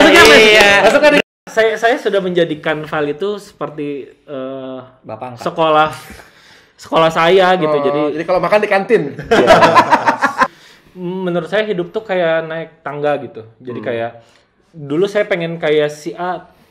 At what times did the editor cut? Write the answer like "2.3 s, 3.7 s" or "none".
1.3 s, 10.6 s